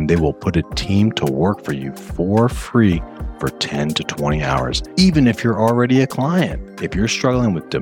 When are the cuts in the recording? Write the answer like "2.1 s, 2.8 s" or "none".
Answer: 4.8 s